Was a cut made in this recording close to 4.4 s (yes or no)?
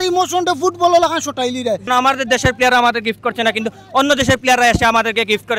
no